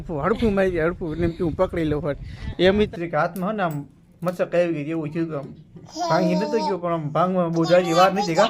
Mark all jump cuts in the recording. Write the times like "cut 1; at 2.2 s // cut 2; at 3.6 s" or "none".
cut 1; at 2.9 s